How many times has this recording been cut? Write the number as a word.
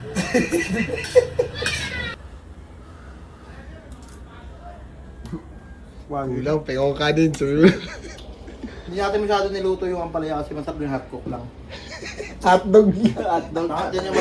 one